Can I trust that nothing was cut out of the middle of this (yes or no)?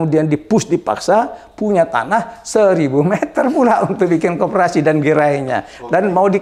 yes